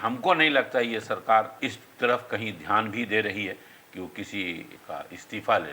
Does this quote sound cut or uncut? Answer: cut